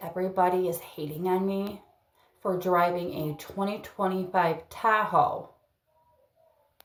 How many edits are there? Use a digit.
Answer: 0